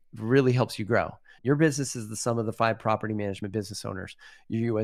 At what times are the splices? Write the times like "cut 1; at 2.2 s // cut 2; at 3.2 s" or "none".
none